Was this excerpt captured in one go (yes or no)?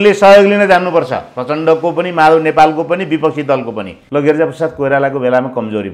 no